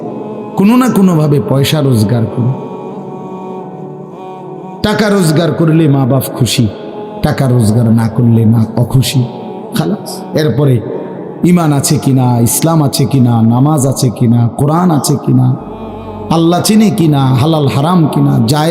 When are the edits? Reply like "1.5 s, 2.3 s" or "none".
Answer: 3.1 s, 4.8 s